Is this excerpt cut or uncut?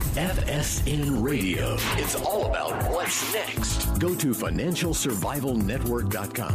uncut